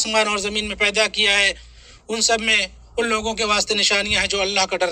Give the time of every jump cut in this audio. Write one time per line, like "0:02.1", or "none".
none